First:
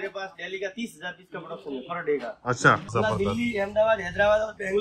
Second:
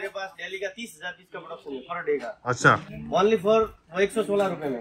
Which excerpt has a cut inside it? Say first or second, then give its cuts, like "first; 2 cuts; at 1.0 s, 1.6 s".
first; 1 cut; at 2.9 s